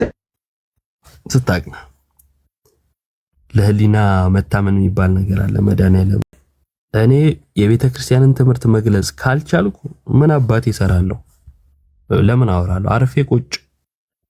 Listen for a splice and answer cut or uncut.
uncut